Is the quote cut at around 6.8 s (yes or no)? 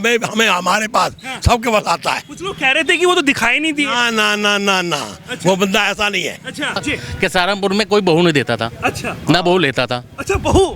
yes